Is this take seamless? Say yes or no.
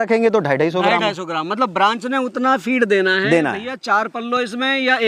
yes